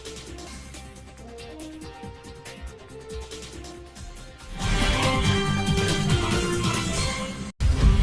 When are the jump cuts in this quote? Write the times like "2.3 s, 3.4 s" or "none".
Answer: none